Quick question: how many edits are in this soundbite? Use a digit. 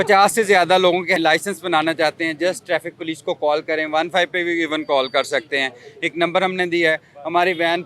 1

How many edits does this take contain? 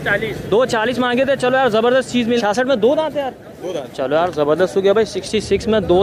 1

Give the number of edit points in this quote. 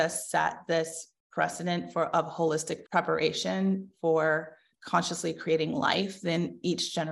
2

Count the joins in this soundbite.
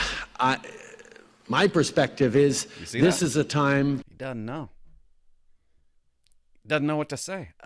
0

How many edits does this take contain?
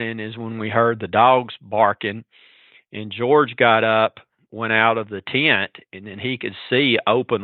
0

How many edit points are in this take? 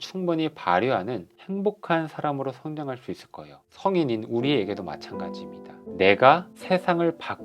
1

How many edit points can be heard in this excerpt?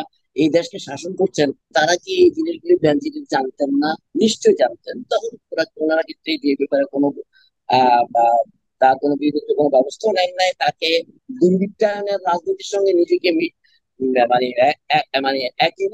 2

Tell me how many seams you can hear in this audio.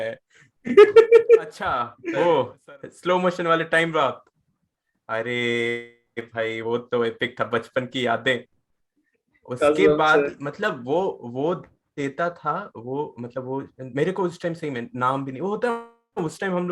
1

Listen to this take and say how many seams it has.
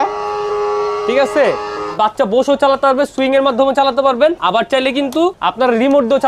3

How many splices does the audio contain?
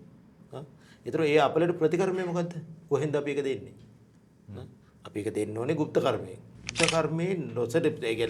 1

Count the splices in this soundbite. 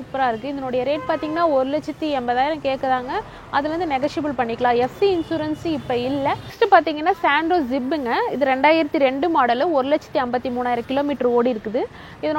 0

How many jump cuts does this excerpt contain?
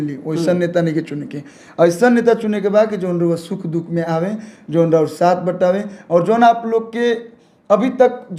0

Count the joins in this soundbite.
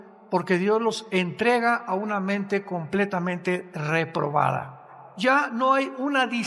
1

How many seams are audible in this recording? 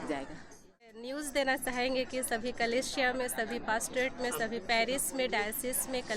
1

